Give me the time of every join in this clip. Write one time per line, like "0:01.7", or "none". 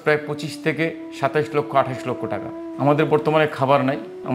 0:02.7